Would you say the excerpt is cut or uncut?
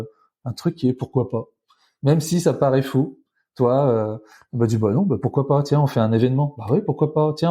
uncut